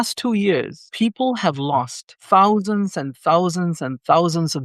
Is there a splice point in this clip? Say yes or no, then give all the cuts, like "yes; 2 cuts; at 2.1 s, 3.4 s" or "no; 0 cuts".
no; 0 cuts